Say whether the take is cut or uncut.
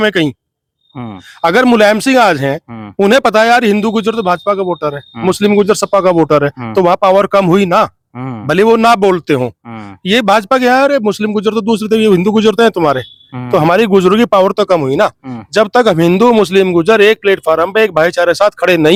uncut